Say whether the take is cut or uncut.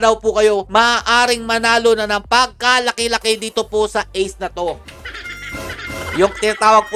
uncut